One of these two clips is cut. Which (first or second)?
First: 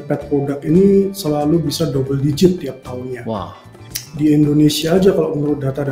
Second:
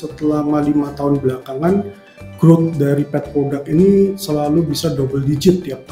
first